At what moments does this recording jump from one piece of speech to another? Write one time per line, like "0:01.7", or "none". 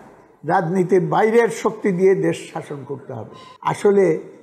none